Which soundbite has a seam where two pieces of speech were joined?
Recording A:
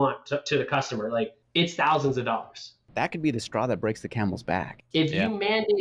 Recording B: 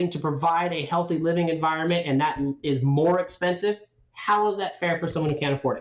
A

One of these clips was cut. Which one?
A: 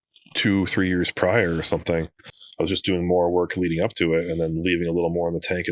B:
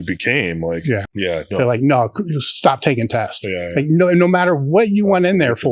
B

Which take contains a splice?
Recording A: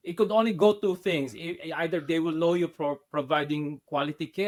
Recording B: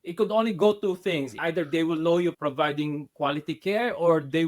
B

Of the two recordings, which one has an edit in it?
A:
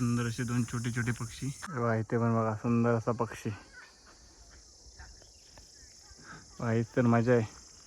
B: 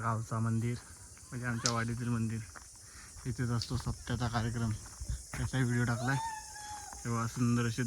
A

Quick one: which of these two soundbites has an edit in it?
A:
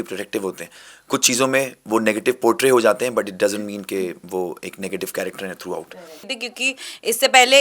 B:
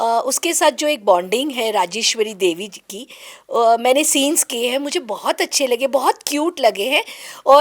A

